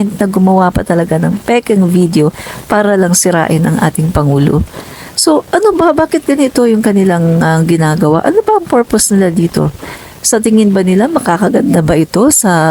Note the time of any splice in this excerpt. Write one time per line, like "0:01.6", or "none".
none